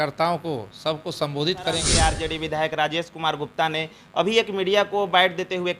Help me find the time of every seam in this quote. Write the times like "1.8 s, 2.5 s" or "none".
1.9 s